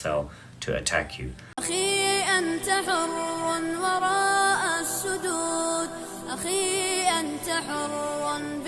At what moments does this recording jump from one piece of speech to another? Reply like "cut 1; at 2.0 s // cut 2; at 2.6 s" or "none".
cut 1; at 1.5 s